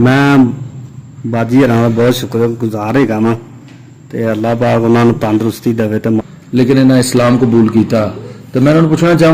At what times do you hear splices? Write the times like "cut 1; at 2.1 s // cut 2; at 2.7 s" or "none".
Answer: cut 1; at 6.3 s